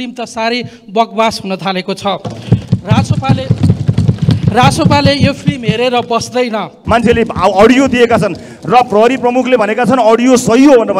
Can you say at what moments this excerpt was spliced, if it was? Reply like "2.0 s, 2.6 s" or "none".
6.7 s